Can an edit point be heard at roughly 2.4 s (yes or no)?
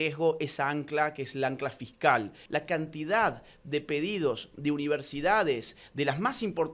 yes